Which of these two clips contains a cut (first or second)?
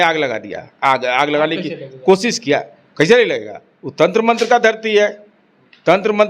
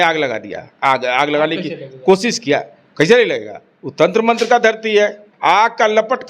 second